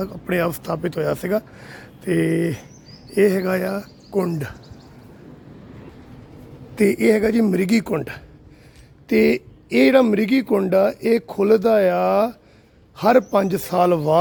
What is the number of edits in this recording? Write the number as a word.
zero